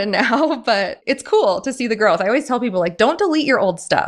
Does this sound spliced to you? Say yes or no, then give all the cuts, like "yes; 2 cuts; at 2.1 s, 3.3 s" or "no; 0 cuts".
yes; 1 cut; at 0.9 s